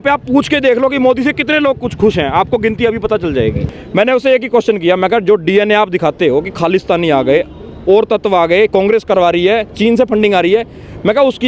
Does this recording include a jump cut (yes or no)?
yes